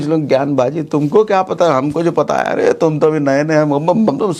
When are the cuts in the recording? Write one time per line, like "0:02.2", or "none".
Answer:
none